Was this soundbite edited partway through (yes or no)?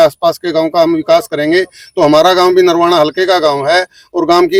no